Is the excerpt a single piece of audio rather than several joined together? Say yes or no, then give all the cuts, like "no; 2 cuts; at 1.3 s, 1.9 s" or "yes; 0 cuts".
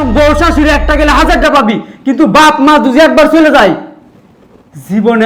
yes; 0 cuts